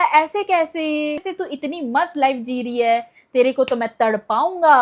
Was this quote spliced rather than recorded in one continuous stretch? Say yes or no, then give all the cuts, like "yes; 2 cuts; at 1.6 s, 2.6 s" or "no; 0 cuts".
no; 0 cuts